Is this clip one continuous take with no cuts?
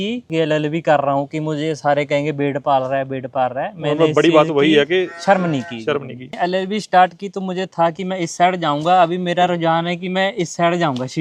yes; 0 cuts

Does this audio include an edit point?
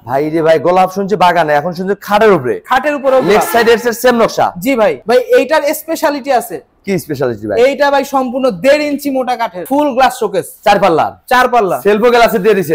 yes; 2 cuts; at 5.0 s, 9.7 s

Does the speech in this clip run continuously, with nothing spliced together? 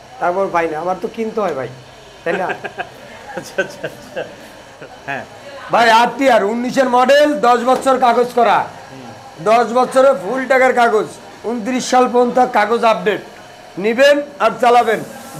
yes; 0 cuts

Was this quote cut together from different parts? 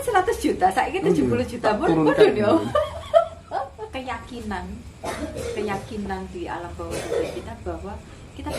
yes; 1 cut; at 3.7 s

